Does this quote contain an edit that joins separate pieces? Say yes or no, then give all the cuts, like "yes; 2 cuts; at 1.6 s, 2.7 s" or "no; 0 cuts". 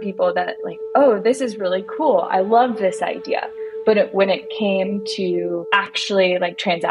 no; 0 cuts